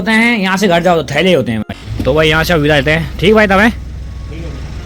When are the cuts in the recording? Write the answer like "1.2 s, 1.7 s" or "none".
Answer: 1.7 s